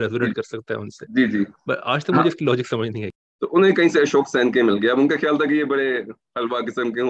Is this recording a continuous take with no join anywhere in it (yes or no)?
no